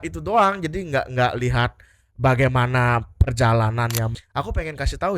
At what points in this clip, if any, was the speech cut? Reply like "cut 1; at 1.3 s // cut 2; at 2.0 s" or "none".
cut 1; at 4.1 s